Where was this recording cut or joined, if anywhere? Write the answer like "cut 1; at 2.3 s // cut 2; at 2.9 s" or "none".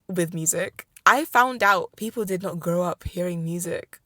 cut 1; at 1.9 s